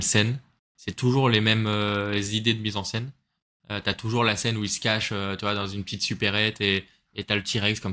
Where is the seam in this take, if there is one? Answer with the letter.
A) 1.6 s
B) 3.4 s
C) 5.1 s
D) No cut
D